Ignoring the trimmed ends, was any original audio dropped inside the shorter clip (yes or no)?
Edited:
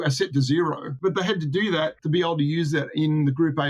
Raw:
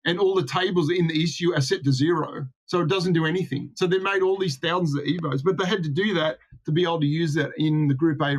yes